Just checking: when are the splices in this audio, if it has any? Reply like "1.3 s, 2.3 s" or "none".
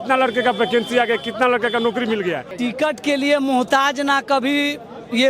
2.5 s

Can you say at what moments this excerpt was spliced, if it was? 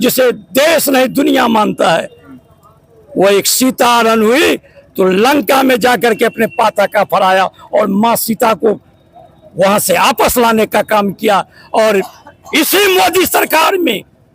none

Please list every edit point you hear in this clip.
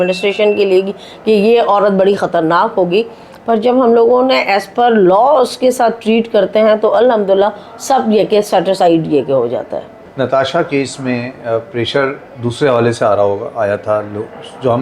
none

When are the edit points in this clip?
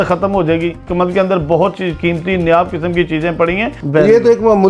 0.8 s, 3.8 s

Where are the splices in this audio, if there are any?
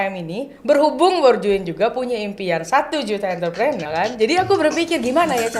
3.8 s

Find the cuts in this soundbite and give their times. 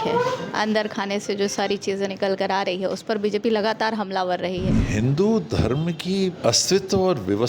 4.8 s, 6.4 s

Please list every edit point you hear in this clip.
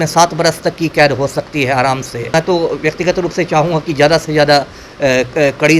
2.3 s

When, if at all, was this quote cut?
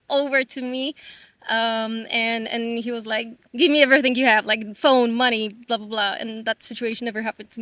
none

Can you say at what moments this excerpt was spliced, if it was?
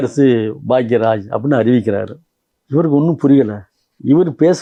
none

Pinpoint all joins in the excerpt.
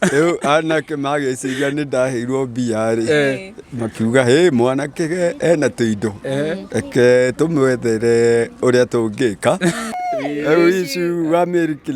10.0 s

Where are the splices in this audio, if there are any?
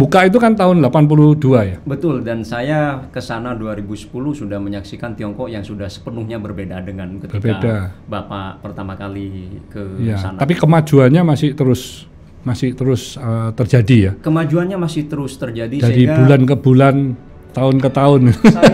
none

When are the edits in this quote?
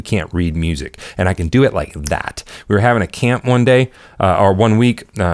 none

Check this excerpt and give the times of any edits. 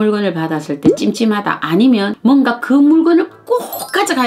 2.1 s

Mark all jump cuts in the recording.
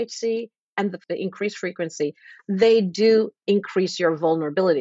1.0 s

